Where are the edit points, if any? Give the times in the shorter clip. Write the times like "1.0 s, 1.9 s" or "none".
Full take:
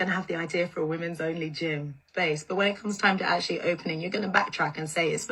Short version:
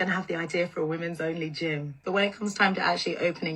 2.0 s